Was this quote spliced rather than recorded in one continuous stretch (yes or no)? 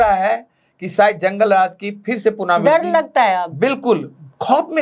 no